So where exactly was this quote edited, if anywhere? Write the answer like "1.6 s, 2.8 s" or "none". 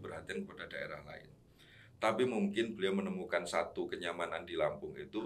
none